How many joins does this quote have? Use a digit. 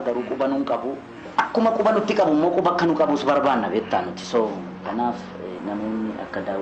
2